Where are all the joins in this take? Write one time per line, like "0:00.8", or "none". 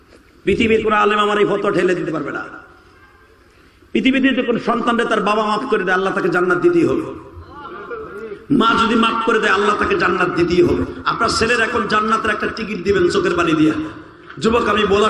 0:11.0